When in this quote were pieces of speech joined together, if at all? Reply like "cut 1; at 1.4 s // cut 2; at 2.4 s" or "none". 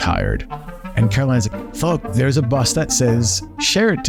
none